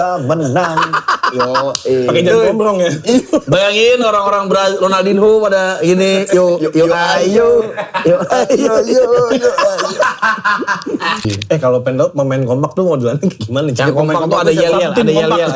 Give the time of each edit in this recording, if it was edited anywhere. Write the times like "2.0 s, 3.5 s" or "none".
11.2 s